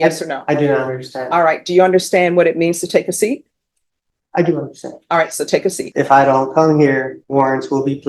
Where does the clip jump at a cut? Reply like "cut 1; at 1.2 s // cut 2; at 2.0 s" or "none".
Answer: cut 1; at 5.8 s // cut 2; at 7.2 s